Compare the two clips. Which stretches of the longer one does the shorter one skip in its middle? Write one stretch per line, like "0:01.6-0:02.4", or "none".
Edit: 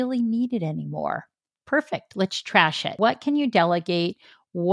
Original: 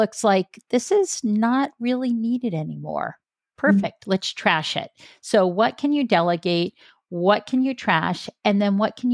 0:04.9-0:05.5